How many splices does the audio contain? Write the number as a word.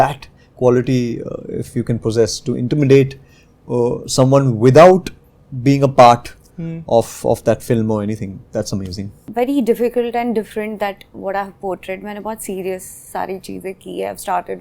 one